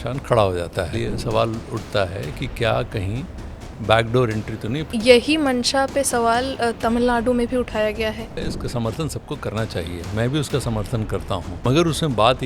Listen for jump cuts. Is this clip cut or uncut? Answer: cut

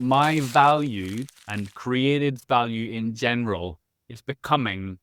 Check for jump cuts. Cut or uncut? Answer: uncut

